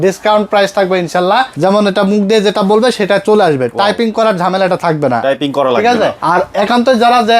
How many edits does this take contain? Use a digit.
2